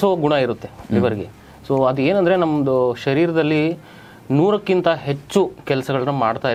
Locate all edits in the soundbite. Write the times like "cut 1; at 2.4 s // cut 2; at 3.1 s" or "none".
none